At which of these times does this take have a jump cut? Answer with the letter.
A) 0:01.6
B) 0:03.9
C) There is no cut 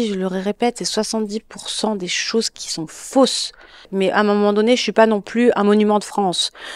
B